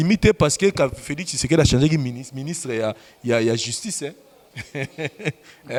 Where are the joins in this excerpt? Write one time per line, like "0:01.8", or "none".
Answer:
none